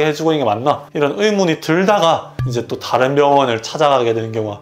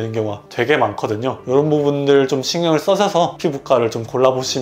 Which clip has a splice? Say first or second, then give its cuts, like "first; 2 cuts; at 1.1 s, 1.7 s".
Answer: second; 2 cuts; at 1.4 s, 3.4 s